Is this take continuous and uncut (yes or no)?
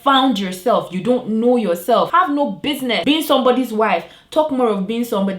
no